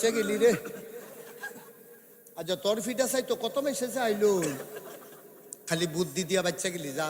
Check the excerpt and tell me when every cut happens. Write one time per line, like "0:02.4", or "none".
none